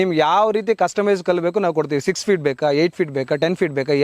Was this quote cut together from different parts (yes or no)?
no